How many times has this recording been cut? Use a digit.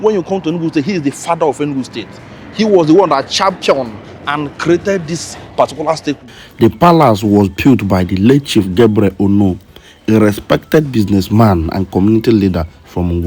1